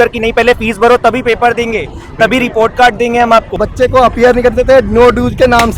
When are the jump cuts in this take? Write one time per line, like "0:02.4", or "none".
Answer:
0:03.6